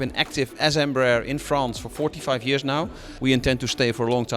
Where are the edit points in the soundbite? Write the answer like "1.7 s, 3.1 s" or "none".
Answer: 3.1 s

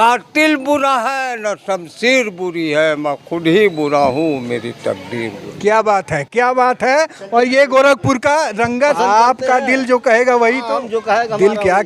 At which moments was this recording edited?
8.8 s

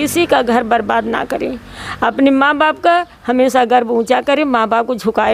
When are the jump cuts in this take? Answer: none

